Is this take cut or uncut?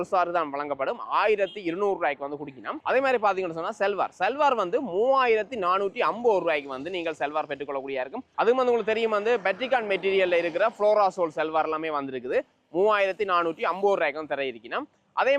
uncut